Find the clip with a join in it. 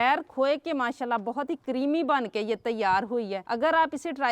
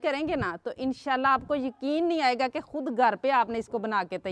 first; 1 cut; at 3.4 s

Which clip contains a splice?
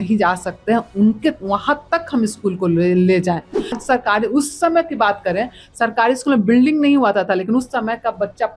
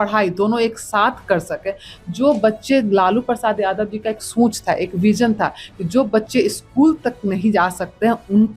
first; 1 cut; at 3.8 s

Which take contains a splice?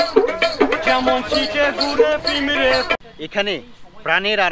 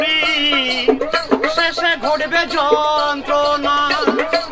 first; 1 cut; at 2.9 s

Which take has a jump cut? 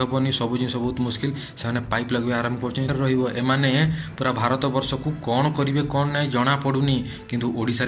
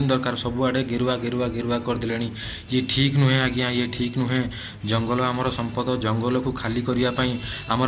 first; 1 cut; at 2.9 s

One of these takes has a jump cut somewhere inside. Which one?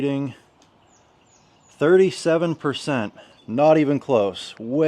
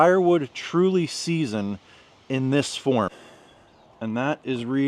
second; 1 cut; at 3.1 s

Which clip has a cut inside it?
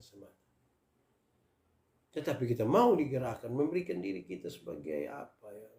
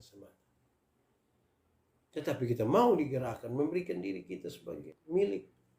second; 1 cut; at 4.8 s

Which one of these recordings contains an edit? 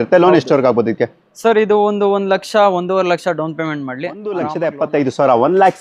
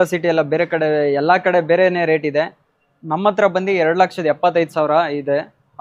first; 1 cut; at 4.4 s

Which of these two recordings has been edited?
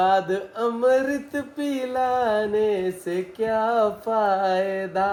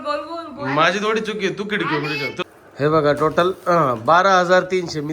second; 1 cut; at 2.4 s

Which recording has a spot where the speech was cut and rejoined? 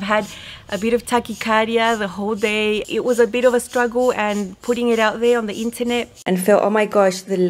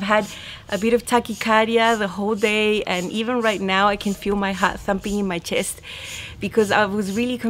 first; 2 cuts; at 2.9 s, 6.1 s

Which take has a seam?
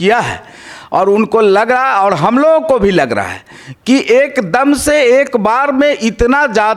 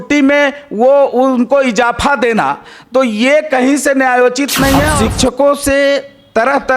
second; 1 cut; at 4.9 s

